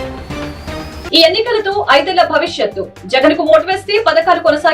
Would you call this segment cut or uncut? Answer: cut